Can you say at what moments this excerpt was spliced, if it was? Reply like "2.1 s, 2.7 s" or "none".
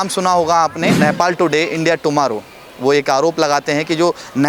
1.0 s